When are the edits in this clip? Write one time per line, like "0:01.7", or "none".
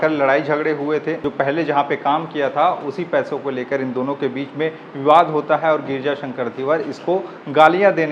0:01.2